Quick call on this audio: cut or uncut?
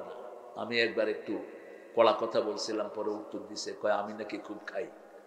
uncut